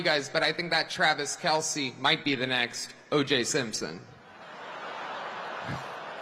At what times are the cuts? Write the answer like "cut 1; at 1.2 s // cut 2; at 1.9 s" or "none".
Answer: none